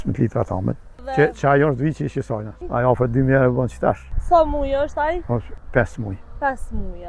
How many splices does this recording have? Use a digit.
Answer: 3